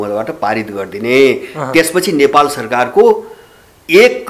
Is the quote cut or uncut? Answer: uncut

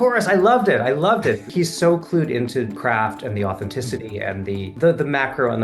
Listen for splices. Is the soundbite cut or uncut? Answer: cut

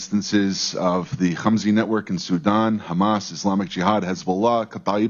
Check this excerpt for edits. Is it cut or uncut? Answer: uncut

